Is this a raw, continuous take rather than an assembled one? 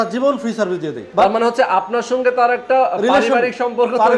yes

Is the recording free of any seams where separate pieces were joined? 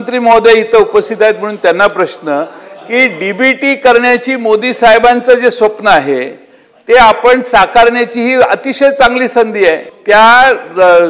no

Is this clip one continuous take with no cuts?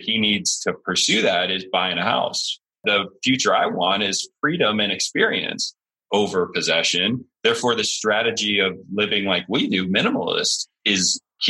no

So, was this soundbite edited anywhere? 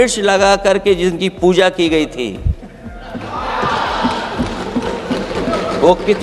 no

